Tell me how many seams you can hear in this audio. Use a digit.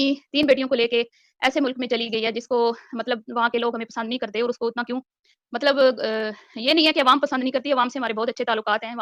0